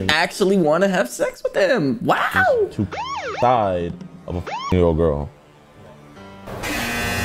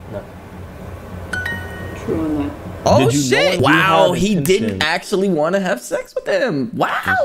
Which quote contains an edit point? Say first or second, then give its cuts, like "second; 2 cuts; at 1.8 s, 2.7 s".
second; 1 cut; at 3.6 s